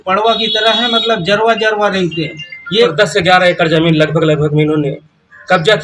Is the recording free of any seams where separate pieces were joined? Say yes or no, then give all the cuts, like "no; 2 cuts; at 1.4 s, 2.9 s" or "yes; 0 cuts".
no; 1 cut; at 2.9 s